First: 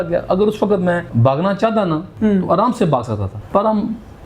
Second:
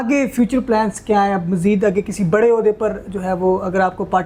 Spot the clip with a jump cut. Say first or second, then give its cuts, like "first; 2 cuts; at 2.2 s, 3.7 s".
first; 3 cuts; at 1.1 s, 2.1 s, 3.3 s